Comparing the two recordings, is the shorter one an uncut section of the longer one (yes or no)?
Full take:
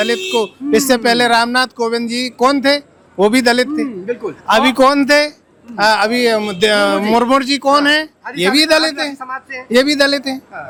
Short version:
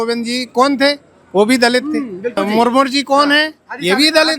no